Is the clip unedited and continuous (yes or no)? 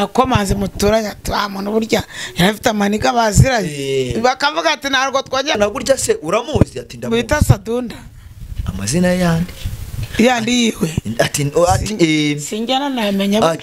no